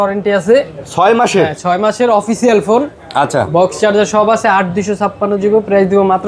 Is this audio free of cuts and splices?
yes; 0 cuts

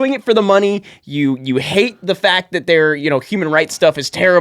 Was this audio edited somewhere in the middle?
no; 0 cuts

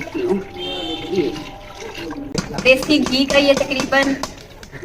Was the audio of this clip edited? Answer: yes; 1 cut; at 2.3 s

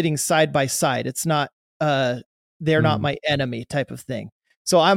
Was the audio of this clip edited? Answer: no; 0 cuts

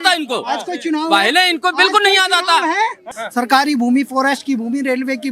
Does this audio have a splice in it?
yes; 1 cut; at 3.2 s

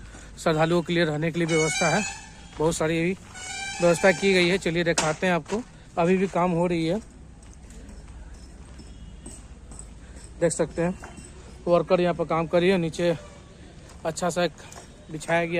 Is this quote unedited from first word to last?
yes; 0 cuts

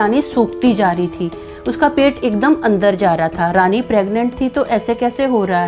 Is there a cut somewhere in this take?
no; 0 cuts

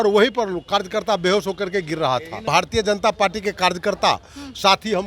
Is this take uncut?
no; 1 cut; at 2.5 s

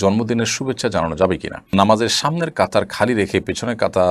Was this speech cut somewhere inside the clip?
yes; 1 cut; at 1.6 s

